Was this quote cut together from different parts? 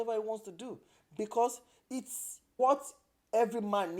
yes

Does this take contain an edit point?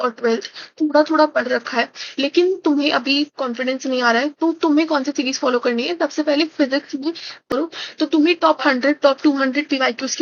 yes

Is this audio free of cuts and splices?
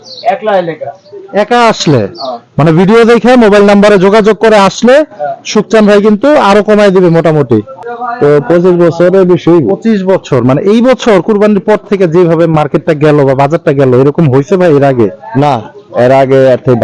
no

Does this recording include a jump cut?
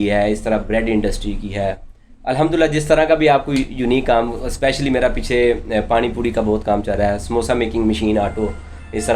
no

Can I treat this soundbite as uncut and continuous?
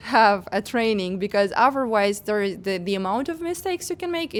yes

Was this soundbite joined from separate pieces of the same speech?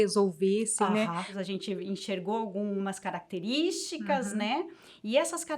yes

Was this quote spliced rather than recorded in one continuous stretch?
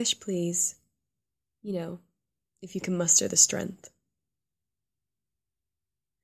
yes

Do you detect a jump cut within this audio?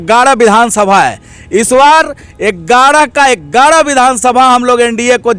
no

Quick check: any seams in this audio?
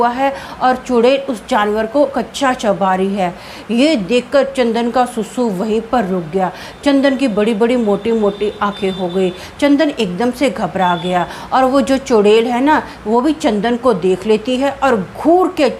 no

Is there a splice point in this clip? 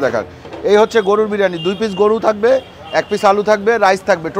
no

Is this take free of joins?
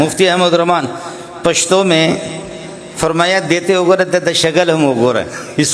yes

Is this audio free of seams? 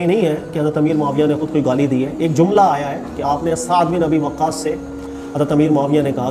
yes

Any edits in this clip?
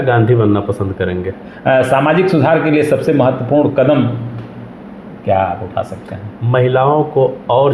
no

